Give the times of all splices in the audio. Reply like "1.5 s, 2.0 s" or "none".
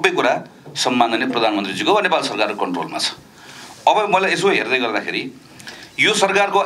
none